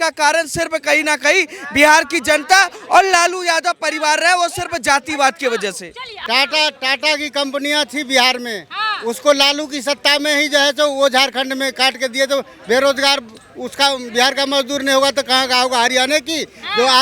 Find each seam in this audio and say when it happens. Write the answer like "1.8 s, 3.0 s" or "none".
6.1 s